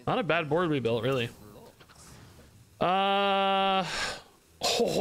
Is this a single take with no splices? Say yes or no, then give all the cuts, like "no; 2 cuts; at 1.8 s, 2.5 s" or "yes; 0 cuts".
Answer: yes; 0 cuts